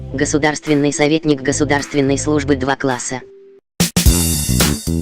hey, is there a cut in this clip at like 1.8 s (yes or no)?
no